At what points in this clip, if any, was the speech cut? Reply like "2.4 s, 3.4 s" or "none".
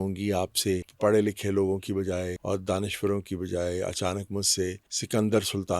0.9 s, 2.4 s, 4.9 s